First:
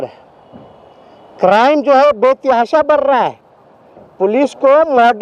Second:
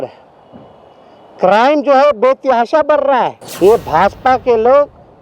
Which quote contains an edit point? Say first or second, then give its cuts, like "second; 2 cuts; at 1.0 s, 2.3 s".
second; 1 cut; at 3.4 s